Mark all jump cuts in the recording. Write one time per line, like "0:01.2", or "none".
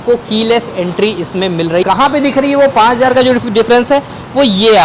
0:01.9